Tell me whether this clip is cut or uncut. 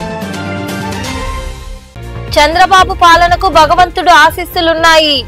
uncut